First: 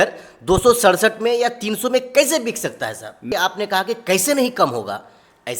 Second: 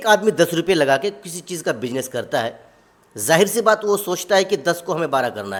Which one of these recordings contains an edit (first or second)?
first